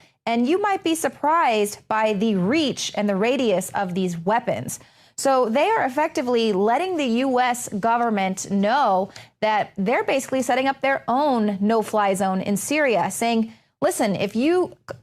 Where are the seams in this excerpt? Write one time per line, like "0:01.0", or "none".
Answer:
0:04.0